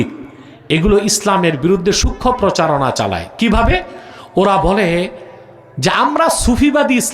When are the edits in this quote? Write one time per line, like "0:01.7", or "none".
none